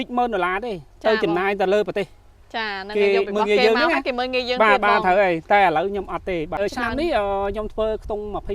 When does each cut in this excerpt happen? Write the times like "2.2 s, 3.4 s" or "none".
6.6 s